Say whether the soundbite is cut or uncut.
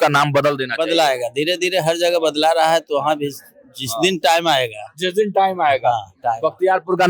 uncut